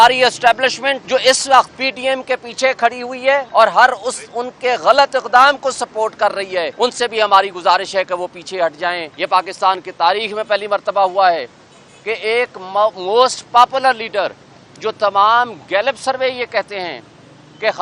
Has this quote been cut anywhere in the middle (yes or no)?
yes